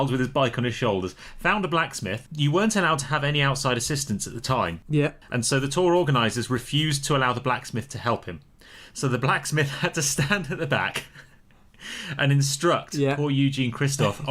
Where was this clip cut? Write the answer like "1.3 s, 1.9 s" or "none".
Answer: none